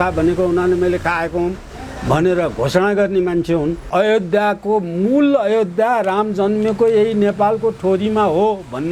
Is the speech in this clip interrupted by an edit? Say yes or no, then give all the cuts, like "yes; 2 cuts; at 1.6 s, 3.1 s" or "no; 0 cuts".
yes; 1 cut; at 3.8 s